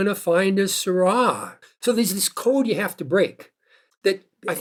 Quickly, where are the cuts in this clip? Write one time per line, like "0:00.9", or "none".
none